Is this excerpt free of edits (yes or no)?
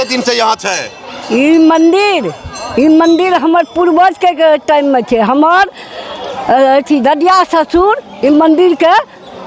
yes